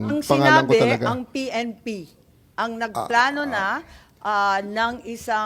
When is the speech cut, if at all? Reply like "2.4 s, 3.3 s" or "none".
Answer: none